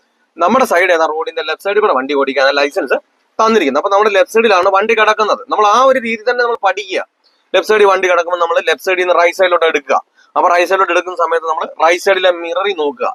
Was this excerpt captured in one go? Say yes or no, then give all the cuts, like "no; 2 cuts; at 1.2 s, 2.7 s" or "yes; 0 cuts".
yes; 0 cuts